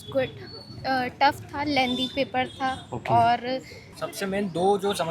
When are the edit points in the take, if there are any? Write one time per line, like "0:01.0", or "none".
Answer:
0:03.9